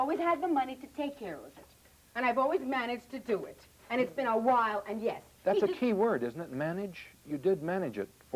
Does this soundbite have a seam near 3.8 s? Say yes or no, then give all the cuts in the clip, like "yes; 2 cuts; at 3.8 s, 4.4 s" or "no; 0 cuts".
no; 0 cuts